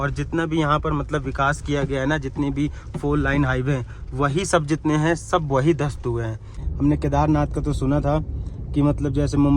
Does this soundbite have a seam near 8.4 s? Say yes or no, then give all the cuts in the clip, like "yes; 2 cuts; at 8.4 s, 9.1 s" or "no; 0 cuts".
no; 1 cut; at 6.6 s